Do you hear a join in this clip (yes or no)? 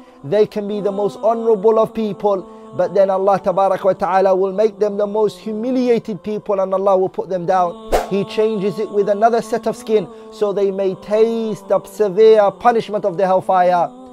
yes